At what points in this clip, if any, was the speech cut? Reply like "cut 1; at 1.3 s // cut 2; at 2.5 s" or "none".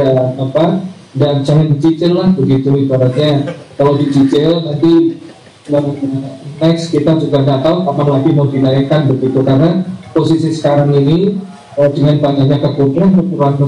none

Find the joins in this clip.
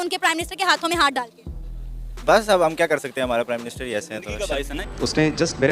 cut 1; at 4.7 s

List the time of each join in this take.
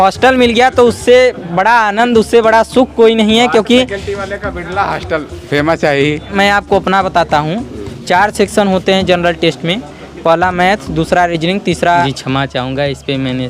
cut 1; at 6.3 s // cut 2; at 12.1 s

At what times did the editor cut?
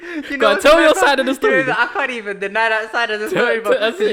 none

